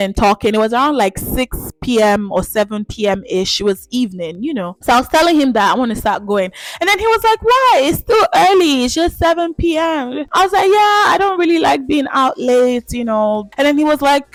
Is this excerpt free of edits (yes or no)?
yes